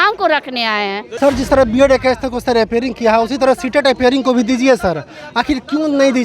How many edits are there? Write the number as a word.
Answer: one